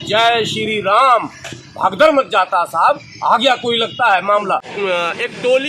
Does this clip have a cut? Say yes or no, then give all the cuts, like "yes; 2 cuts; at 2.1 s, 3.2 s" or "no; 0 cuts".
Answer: yes; 1 cut; at 4.7 s